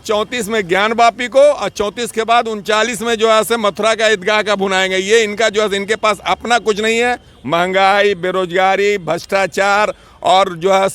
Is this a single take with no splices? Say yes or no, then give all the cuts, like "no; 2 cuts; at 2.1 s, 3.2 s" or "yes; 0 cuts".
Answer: yes; 0 cuts